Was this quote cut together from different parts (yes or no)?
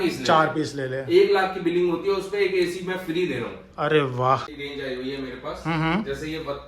yes